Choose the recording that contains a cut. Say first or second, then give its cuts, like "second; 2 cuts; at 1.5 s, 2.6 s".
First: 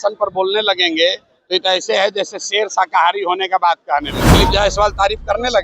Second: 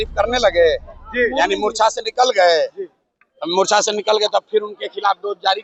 first; 1 cut; at 4.2 s